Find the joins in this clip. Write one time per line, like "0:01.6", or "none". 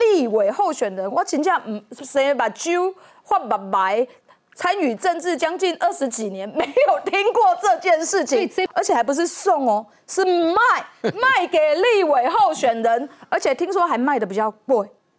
0:08.7